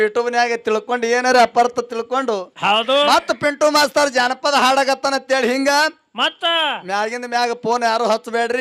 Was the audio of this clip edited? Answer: no; 0 cuts

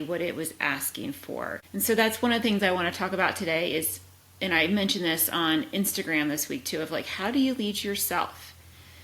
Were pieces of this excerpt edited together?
yes; 1 cut; at 1.6 s

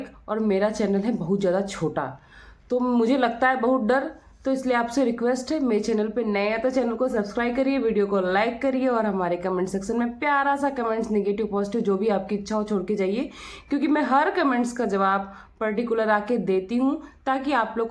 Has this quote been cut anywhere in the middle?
no; 0 cuts

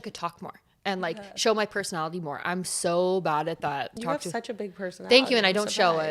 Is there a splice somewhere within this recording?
yes; 1 cut; at 3.9 s

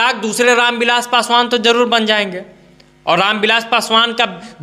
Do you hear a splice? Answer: no; 0 cuts

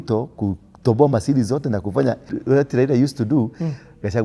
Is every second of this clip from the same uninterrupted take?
no; 1 cut; at 2.3 s

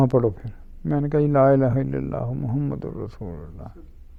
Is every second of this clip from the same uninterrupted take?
yes; 0 cuts

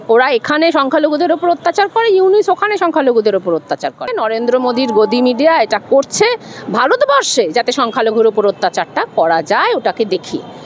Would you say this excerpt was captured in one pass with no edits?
no; 1 cut; at 4.2 s

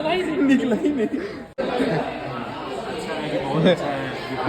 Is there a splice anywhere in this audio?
yes; 1 cut; at 1.5 s

